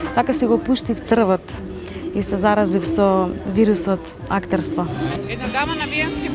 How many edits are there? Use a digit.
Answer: 1